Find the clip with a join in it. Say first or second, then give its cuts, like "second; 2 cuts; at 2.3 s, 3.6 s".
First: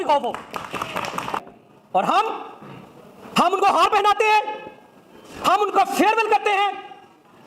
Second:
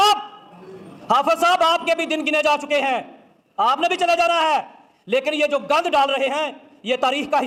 first; 1 cut; at 1.4 s